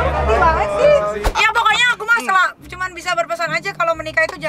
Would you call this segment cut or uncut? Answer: cut